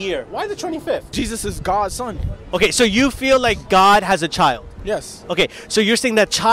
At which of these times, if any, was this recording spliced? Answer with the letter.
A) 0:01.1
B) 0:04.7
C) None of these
A